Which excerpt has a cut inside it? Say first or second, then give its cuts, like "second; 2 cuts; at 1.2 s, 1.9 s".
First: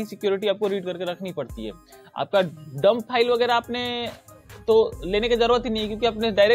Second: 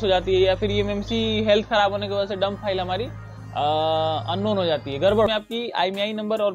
second; 1 cut; at 5.3 s